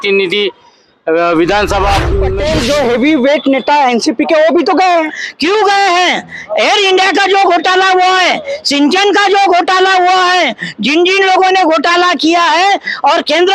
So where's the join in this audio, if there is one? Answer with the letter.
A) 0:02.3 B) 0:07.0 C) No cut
A